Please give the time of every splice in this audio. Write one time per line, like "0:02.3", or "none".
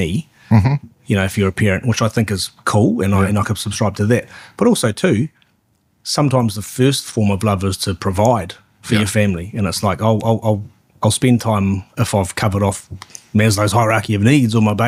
none